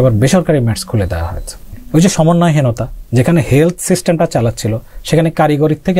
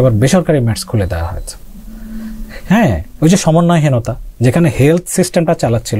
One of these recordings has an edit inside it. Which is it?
first; 1 cut; at 1.8 s

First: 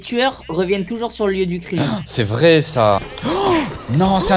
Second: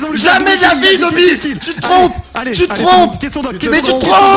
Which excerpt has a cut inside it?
first; 1 cut; at 3.1 s

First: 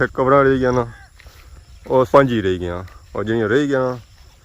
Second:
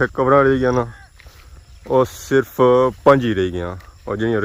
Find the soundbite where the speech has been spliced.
first; 1 cut; at 2.1 s

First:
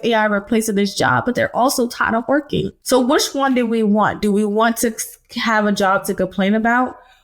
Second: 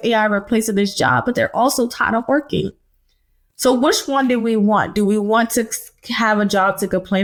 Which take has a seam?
first; 1 cut; at 2.8 s

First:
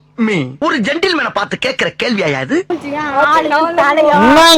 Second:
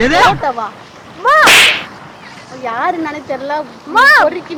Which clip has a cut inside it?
first; 1 cut; at 2.7 s

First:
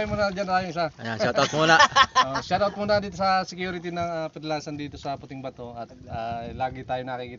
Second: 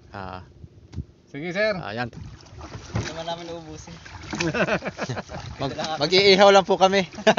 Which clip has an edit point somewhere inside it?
second; 1 cut; at 2.1 s

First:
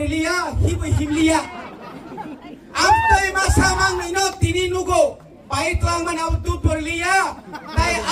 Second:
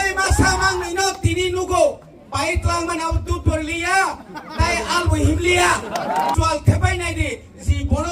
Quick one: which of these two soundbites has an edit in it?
second; 1 cut; at 6.3 s

